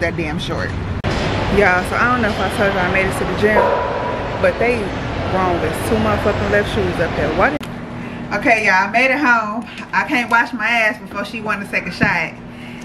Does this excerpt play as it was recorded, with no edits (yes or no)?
no